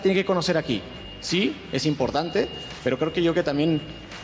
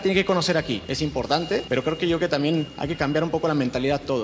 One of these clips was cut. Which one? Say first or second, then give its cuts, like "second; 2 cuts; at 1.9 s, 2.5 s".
second; 2 cuts; at 1.3 s, 2.8 s